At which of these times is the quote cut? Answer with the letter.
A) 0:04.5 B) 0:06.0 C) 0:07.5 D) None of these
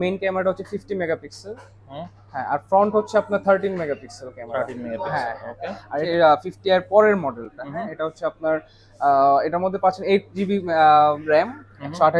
B